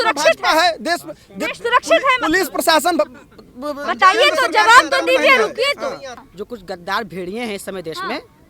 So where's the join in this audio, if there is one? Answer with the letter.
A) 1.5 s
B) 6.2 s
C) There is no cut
B